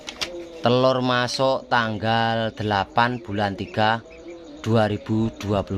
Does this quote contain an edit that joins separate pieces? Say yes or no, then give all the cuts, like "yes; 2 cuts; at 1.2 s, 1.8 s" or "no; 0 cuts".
no; 0 cuts